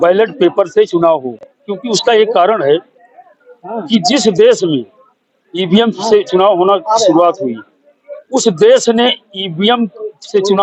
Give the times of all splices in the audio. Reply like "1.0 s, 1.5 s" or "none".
none